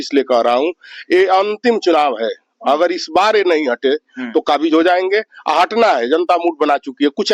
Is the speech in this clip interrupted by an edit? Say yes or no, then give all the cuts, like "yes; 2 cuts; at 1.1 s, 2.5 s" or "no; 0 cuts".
no; 0 cuts